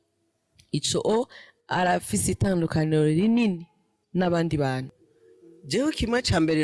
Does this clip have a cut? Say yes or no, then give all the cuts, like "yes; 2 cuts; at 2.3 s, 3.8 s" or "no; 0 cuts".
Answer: yes; 1 cut; at 4.8 s